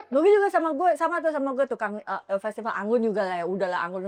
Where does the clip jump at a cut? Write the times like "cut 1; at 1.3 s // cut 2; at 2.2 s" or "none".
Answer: none